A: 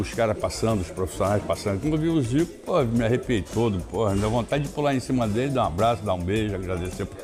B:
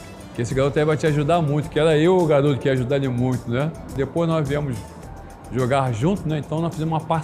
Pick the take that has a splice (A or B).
B